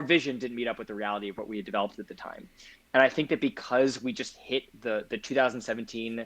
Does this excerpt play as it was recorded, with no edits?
yes; 0 cuts

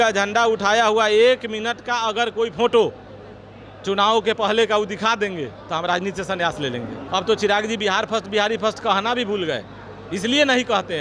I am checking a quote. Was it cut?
yes; 1 cut; at 7.0 s

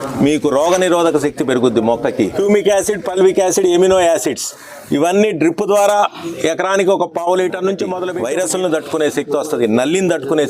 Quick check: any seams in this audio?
yes; 2 cuts; at 2.3 s, 8.0 s

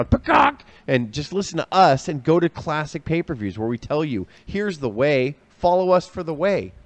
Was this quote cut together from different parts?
no; 0 cuts

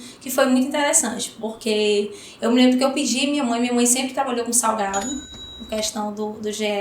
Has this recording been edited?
yes; 1 cut; at 5.3 s

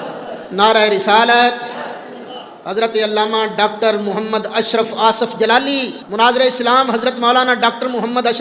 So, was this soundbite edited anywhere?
no; 0 cuts

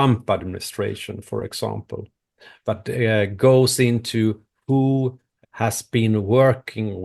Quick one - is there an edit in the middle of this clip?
yes; 1 cut; at 5.3 s

